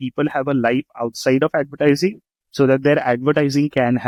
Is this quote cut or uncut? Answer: uncut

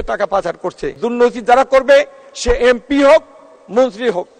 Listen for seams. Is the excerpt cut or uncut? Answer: cut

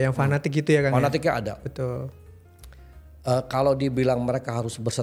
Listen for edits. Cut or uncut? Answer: uncut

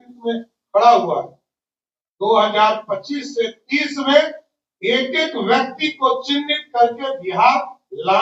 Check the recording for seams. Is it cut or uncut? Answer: uncut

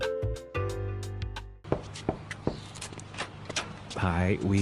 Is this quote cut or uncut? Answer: cut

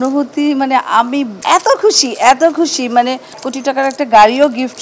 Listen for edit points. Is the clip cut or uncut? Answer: cut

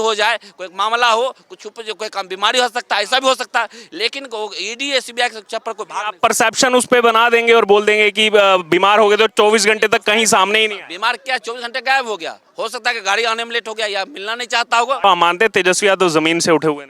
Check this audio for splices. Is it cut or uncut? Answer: cut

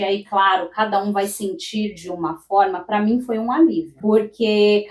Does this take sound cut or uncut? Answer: cut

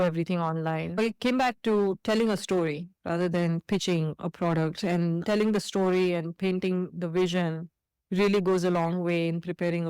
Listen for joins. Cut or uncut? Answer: cut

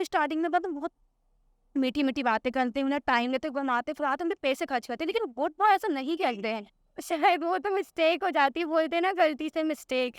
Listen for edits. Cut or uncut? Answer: cut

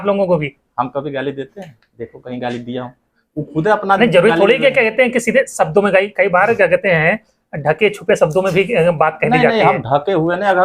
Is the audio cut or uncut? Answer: uncut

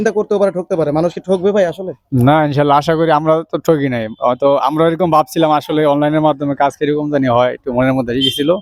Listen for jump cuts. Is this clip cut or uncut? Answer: uncut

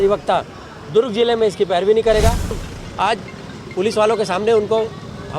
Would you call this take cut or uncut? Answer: cut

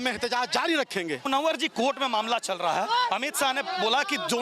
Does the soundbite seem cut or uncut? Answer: cut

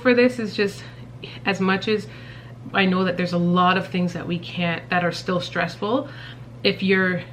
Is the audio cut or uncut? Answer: uncut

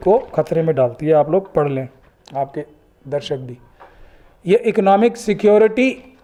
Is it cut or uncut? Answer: uncut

